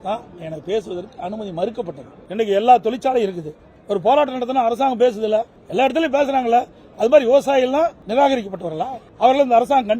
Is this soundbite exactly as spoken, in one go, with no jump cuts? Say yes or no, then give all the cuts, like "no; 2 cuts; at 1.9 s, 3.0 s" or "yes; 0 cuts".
no; 4 cuts; at 2.2 s, 5.6 s, 8.0 s, 9.0 s